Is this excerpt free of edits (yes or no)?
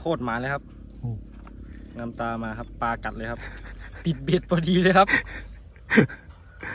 yes